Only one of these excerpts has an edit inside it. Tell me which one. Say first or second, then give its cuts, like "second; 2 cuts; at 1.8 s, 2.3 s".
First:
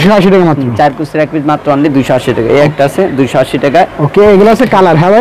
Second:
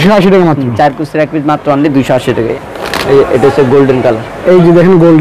second; 1 cut; at 2.5 s